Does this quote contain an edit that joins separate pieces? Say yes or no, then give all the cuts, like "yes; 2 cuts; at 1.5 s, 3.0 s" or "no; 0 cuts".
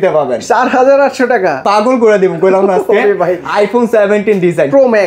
yes; 1 cut; at 3.4 s